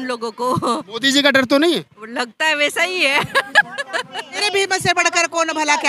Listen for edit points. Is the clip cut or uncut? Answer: cut